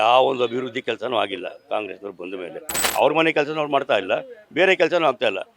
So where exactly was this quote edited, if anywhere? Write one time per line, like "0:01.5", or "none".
0:02.8